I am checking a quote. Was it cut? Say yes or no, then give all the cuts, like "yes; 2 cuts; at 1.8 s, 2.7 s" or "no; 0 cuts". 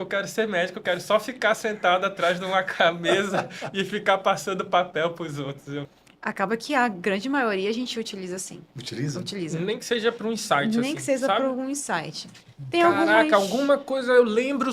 yes; 1 cut; at 5.9 s